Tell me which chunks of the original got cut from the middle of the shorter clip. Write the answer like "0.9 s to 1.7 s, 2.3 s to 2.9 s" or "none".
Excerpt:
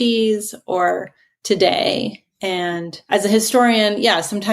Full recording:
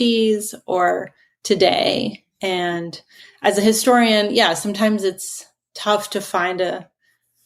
2.9 s to 3.2 s